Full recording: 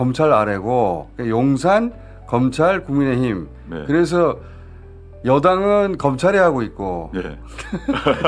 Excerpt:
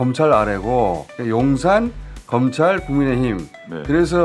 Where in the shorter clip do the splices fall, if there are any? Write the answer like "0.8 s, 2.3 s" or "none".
none